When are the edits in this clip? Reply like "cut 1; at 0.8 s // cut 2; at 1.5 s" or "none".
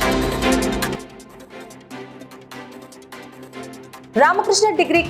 cut 1; at 1.0 s // cut 2; at 3.2 s